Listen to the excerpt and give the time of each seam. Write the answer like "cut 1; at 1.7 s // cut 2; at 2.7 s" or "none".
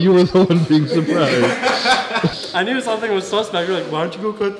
cut 1; at 2.3 s